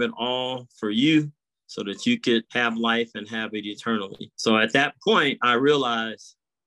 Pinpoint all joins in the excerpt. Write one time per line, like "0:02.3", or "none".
0:02.5
0:04.2